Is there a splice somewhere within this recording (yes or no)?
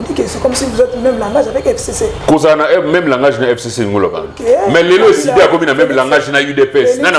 no